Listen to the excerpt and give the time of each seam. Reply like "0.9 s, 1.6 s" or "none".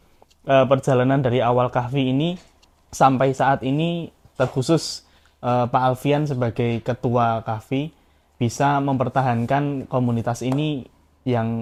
none